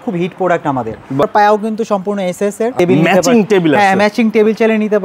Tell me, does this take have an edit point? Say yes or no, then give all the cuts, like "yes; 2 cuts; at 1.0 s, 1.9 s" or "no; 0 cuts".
yes; 2 cuts; at 1.2 s, 2.7 s